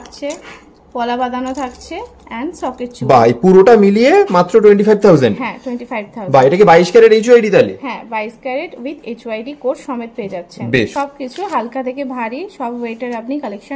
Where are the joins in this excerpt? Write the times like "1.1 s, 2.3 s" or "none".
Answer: 10.9 s